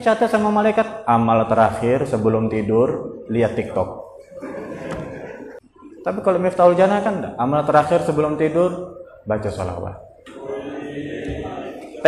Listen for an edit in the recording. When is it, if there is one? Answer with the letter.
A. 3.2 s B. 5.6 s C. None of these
B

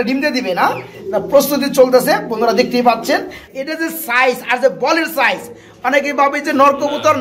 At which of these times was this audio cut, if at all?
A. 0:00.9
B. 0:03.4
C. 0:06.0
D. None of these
B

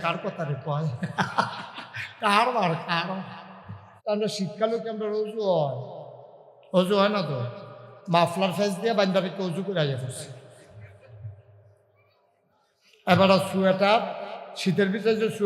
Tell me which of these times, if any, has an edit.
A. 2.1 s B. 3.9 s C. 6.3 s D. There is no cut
B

